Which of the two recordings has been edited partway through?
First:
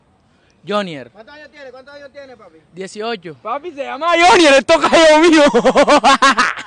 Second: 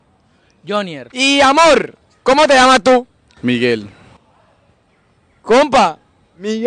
second; 1 cut; at 1.0 s

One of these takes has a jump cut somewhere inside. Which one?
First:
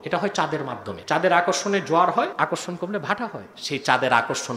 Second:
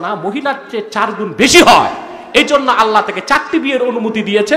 first; 3 cuts; at 0.9 s, 2.3 s, 3.5 s

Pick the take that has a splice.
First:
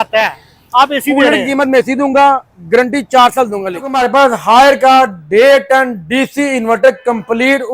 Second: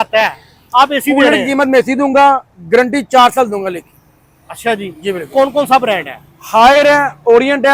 first; 1 cut; at 3.9 s

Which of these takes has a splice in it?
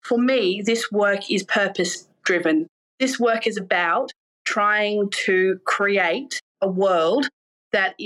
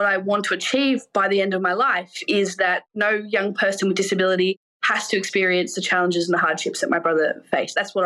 second; 2 cuts; at 1.1 s, 2.9 s

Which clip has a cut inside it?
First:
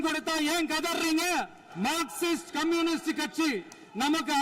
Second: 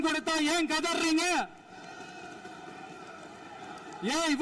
first; 1 cut; at 1.6 s

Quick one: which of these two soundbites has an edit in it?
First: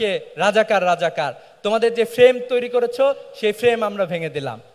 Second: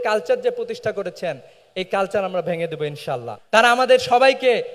second; 1 cut; at 3.3 s

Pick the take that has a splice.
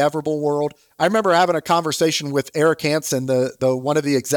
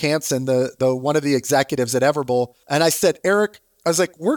second; 1 cut; at 2.6 s

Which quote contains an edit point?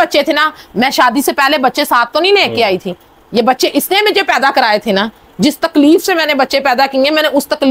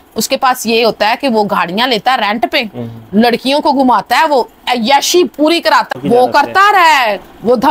second; 1 cut; at 5.9 s

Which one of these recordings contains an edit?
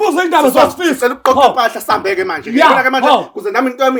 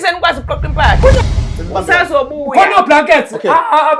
second; 1 cut; at 1.3 s

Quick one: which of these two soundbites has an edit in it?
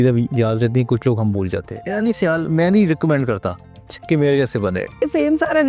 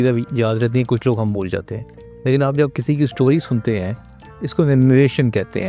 first; 2 cuts; at 2.0 s, 5.0 s

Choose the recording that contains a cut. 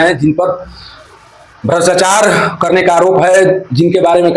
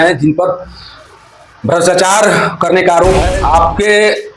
second; 1 cut; at 3.3 s

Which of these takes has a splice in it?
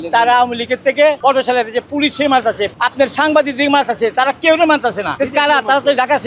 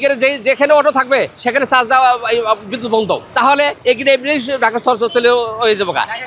first; 3 cuts; at 1.2 s, 2.7 s, 5.1 s

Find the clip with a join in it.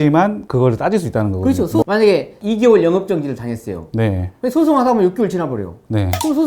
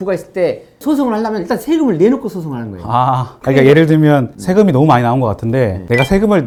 first; 1 cut; at 1.8 s

